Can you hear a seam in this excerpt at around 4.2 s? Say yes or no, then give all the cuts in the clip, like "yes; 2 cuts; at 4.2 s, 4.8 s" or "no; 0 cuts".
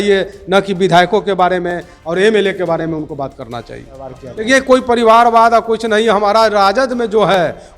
yes; 1 cut; at 4.2 s